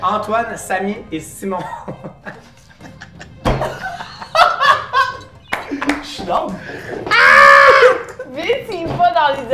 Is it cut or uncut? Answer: uncut